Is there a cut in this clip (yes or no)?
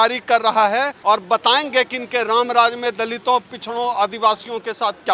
yes